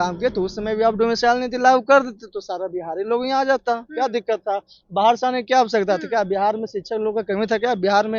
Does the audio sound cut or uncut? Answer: uncut